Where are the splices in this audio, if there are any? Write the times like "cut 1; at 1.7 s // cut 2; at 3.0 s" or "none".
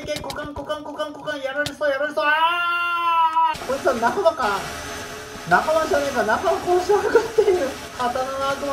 cut 1; at 3.6 s // cut 2; at 7.8 s